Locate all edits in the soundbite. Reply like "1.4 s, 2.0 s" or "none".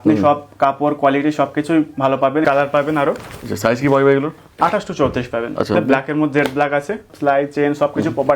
2.4 s, 5.7 s, 7.1 s